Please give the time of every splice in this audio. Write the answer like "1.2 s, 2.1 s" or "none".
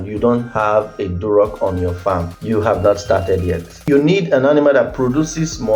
2.3 s, 3.8 s